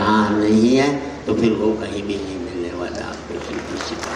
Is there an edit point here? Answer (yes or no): no